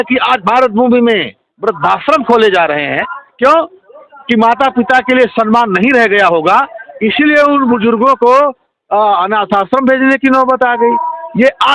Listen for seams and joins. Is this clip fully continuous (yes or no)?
yes